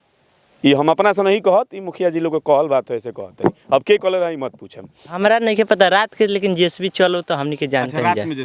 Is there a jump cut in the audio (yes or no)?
yes